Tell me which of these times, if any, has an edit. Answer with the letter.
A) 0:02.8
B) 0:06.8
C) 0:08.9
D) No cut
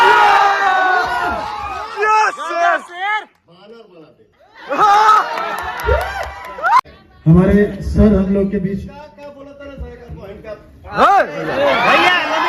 B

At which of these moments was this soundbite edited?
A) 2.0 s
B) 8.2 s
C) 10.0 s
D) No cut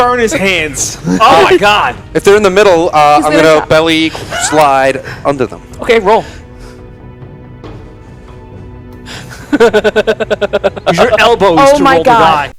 D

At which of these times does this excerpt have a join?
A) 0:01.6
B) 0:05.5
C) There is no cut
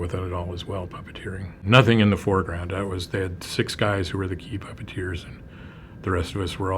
A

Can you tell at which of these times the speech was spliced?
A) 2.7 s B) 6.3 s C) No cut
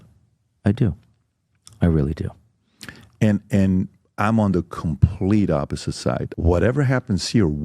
B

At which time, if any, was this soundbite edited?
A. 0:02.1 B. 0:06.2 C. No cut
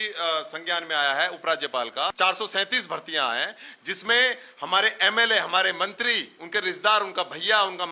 A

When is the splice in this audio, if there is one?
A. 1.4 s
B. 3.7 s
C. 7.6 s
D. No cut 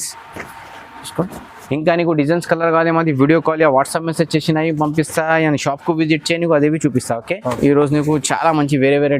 C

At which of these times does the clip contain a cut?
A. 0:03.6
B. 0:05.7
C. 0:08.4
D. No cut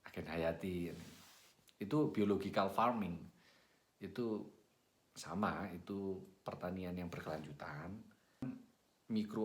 C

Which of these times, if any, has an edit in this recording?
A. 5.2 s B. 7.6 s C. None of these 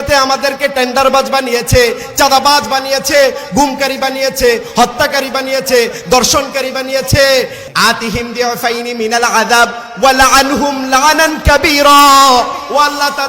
B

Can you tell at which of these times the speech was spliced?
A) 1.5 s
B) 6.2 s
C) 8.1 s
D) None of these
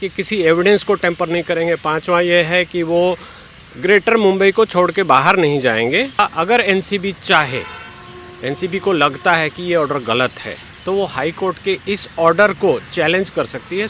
B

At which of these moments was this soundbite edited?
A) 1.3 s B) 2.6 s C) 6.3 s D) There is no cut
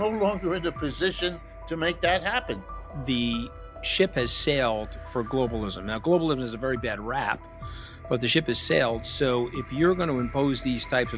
B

